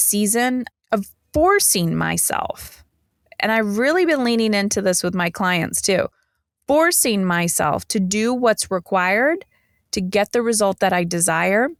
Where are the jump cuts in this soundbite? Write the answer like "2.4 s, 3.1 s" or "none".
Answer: none